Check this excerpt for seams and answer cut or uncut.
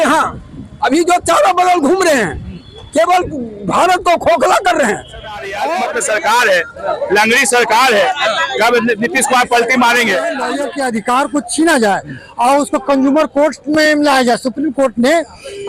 cut